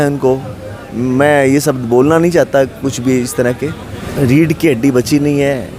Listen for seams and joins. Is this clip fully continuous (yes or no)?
no